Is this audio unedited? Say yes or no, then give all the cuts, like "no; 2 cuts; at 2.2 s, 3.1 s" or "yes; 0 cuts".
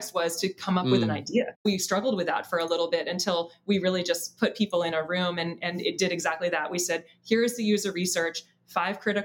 no; 1 cut; at 1.6 s